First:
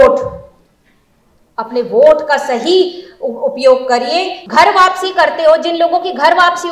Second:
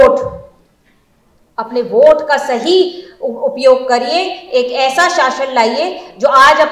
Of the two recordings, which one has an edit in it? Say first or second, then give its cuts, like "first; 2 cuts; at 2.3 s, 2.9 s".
first; 1 cut; at 4.4 s